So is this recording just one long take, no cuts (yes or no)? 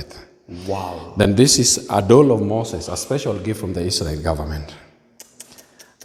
yes